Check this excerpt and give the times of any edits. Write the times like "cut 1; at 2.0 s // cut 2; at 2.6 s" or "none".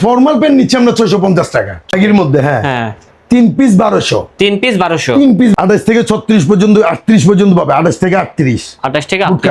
cut 1; at 1.8 s // cut 2; at 5.6 s